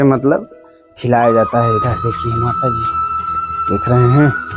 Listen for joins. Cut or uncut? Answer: uncut